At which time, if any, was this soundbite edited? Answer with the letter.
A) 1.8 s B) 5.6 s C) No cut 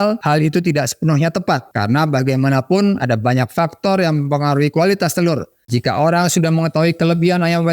B